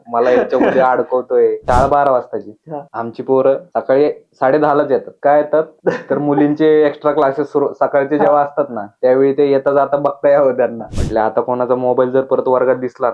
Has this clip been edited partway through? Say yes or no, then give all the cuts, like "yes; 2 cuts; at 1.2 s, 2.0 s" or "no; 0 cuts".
yes; 2 cuts; at 1.6 s, 10.9 s